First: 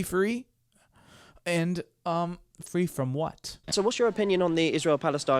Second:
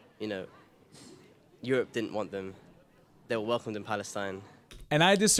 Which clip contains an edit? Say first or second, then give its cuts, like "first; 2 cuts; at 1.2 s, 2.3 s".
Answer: first; 1 cut; at 3.6 s